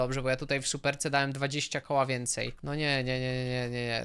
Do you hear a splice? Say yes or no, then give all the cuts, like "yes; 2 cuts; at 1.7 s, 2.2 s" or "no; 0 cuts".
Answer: yes; 1 cut; at 2.6 s